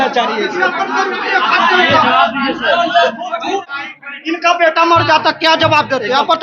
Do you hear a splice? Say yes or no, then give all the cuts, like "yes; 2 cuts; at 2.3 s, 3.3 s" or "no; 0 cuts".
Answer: yes; 1 cut; at 3.7 s